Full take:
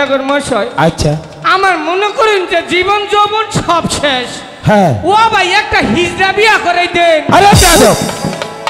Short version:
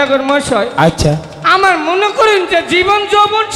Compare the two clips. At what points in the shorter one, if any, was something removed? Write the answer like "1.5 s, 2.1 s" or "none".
none